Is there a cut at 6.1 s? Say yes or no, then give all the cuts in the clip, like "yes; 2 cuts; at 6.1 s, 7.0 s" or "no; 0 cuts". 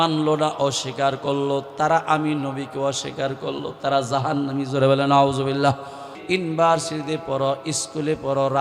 yes; 1 cut; at 6.1 s